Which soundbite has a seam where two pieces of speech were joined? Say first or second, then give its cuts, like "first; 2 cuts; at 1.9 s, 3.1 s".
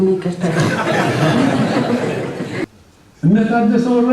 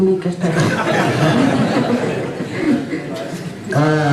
first; 1 cut; at 2.6 s